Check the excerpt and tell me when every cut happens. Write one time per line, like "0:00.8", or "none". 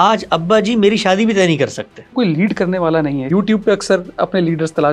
0:02.1
0:03.3